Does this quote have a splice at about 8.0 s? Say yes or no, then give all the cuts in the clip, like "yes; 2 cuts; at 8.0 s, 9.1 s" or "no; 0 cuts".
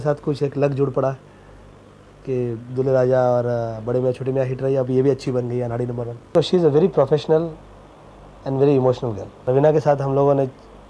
no; 2 cuts; at 6.3 s, 9.3 s